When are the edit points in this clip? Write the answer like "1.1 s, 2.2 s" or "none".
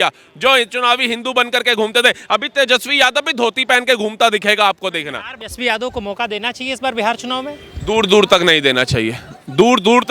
5.4 s